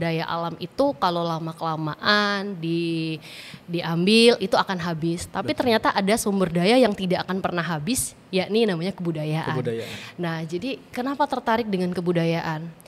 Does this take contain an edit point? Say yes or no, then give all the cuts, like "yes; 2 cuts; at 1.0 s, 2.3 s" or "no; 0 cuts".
no; 0 cuts